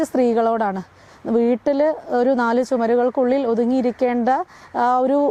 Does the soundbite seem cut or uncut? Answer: uncut